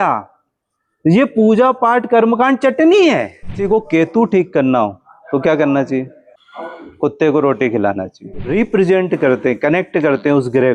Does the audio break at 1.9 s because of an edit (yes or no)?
no